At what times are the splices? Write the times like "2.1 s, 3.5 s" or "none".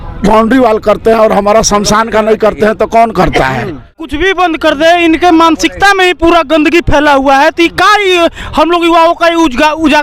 4.1 s